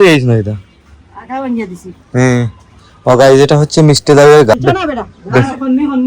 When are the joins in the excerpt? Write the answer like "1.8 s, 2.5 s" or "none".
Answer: 4.5 s